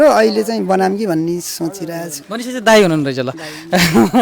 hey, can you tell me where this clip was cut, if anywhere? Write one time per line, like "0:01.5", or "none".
0:02.1

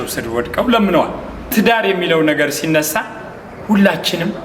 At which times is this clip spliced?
0:01.5

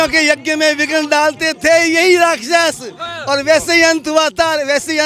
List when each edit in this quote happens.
none

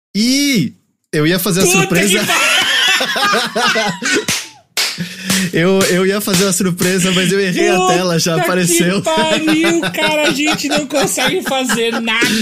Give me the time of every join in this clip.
0:00.9

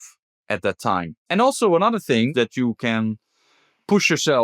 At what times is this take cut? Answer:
0:01.2
0:02.3

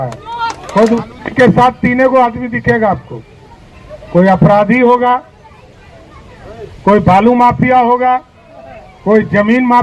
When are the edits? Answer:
0:01.0

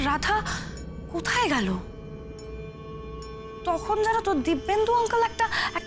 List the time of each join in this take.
none

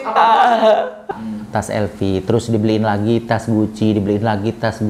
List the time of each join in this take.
0:01.2

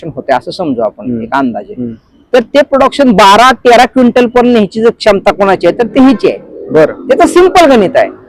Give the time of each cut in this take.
none

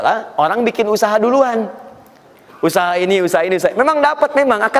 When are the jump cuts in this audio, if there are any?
none

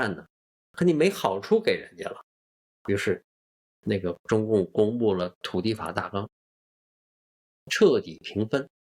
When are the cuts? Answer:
none

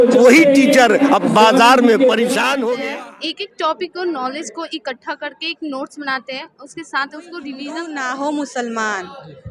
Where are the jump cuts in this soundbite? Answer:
0:02.8
0:07.7

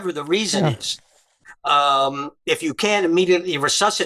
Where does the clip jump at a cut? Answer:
none

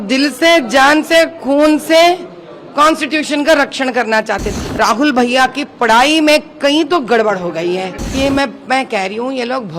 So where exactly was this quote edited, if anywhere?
0:04.5
0:08.0

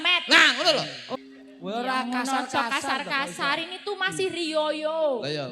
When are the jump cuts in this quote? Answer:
0:01.1

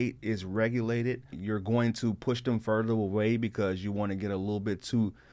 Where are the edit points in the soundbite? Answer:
0:01.3

